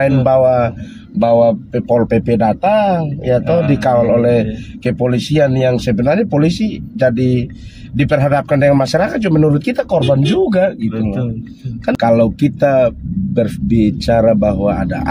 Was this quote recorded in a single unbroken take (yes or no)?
no